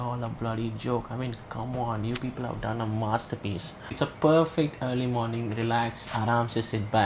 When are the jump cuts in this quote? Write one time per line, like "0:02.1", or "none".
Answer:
0:03.9